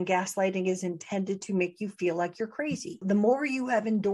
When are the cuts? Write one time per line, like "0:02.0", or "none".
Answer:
0:03.0